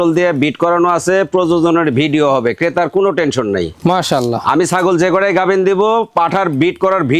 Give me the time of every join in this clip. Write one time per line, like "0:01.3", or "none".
none